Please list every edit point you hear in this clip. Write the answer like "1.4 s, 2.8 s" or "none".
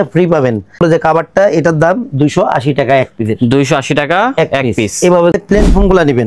0.8 s, 5.3 s